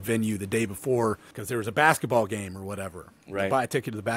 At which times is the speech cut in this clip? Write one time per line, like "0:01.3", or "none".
0:01.3

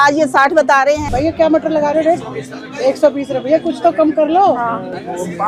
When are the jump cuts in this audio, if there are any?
0:01.0

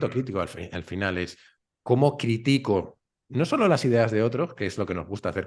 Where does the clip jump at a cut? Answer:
none

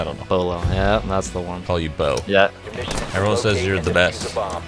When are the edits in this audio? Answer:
0:02.7

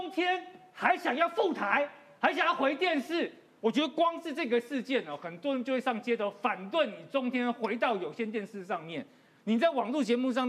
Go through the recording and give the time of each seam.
none

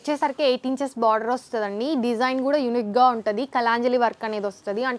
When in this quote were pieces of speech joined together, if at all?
none

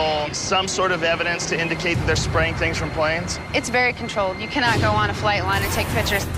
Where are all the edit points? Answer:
0:04.5

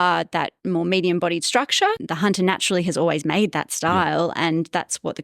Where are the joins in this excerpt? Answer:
0:02.0

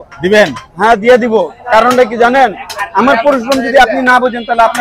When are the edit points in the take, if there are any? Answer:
none

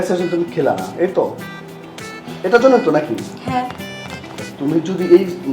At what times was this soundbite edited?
none

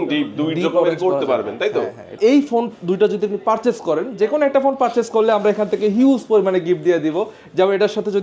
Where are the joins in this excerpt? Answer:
0:02.1

